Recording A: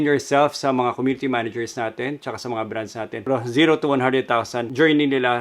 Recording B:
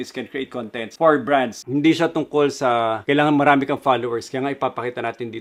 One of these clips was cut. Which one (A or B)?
A